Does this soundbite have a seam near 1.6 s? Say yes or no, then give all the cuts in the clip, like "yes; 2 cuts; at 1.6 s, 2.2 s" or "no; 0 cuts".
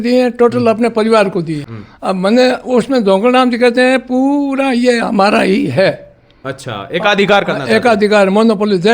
yes; 1 cut; at 1.6 s